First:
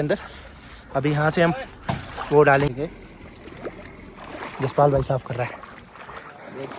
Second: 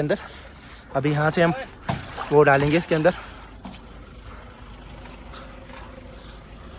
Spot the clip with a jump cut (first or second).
first